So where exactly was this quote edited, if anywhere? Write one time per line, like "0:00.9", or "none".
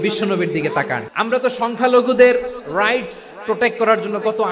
0:01.0